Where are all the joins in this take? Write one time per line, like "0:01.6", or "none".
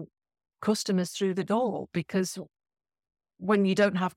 none